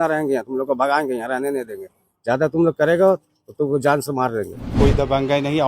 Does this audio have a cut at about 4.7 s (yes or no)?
yes